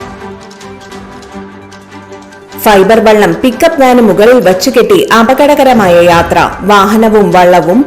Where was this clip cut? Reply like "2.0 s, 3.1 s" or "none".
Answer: 0.9 s, 2.6 s